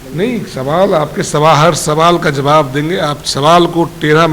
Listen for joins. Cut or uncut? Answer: uncut